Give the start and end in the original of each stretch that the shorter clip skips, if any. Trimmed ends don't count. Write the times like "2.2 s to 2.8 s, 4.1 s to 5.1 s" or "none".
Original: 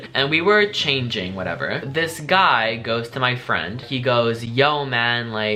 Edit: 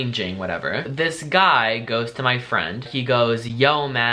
none